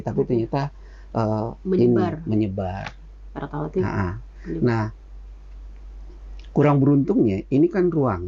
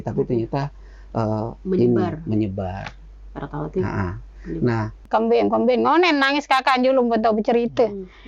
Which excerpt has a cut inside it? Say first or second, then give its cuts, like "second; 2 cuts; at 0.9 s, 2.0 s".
second; 1 cut; at 5.0 s